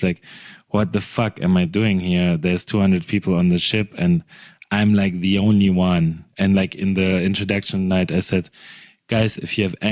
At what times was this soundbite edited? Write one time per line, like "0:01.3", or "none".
none